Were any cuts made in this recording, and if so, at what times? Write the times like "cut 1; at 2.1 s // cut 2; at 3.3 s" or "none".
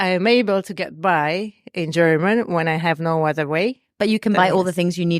cut 1; at 3.8 s